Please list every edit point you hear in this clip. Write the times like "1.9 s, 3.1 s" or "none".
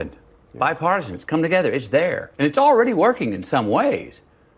2.2 s